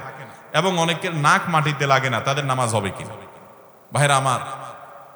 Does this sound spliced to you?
no; 0 cuts

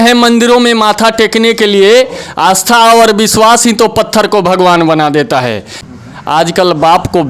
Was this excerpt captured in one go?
no; 1 cut; at 5.7 s

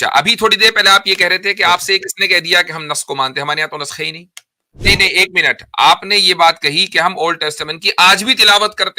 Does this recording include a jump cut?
yes; 1 cut; at 4.7 s

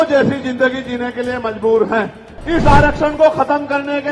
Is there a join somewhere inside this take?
yes; 1 cut; at 2.3 s

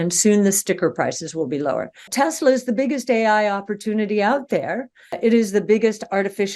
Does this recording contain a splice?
yes; 2 cuts; at 2.0 s, 5.0 s

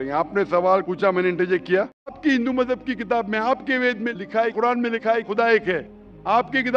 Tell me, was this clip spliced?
yes; 1 cut; at 2.2 s

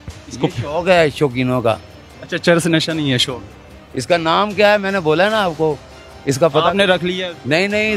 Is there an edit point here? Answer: no; 0 cuts

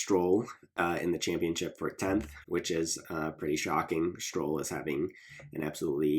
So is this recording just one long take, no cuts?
yes; 0 cuts

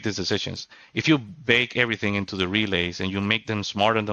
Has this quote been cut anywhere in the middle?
no; 0 cuts

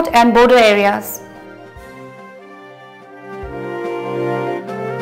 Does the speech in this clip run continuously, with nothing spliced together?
no; 1 cut; at 1.1 s

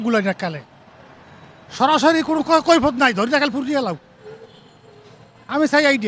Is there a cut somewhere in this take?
no; 0 cuts

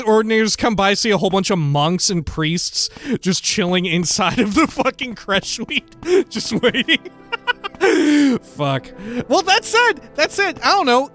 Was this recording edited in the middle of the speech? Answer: no; 0 cuts

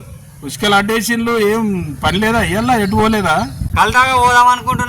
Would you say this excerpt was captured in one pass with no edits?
no; 1 cut; at 3.9 s

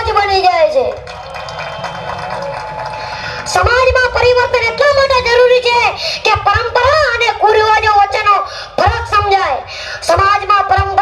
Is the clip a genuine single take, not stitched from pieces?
yes; 0 cuts

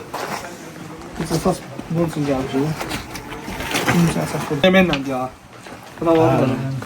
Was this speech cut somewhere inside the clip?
yes; 1 cut; at 4.6 s

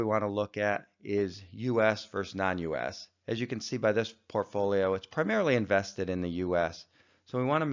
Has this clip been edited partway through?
yes; 1 cut; at 1.8 s

